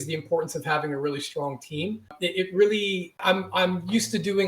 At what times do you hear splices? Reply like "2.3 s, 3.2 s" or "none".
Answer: 2.1 s, 3.1 s

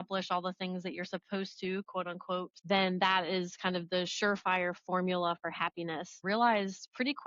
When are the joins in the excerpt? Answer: 2.5 s, 6.2 s

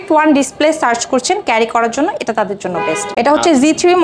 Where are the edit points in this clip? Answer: 3.1 s

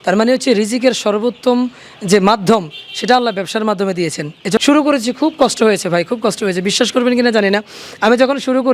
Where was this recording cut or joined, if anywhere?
4.6 s

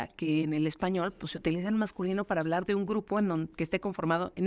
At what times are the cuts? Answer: none

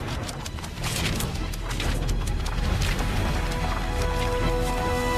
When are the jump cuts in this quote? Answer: 3.0 s

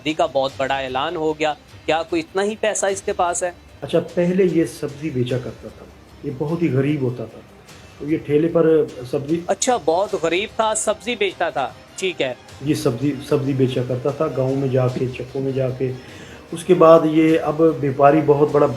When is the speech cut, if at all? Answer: 3.9 s

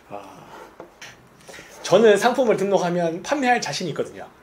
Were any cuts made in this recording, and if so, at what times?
0.9 s

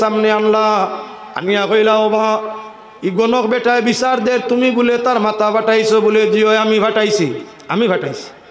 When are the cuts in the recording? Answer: none

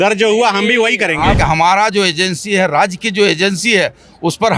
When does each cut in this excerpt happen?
1.4 s

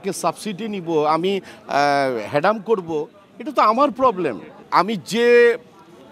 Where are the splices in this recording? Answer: 4.6 s

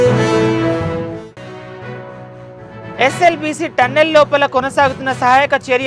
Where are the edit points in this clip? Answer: none

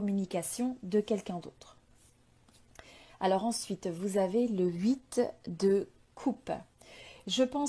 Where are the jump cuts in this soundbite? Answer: none

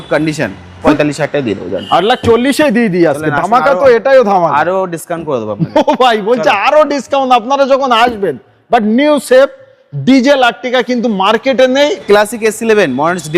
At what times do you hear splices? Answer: 0.9 s, 12.0 s

